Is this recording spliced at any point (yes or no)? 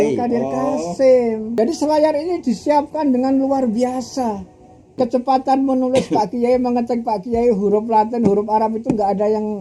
yes